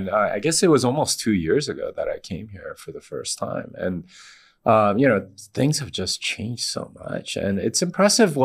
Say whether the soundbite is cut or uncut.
uncut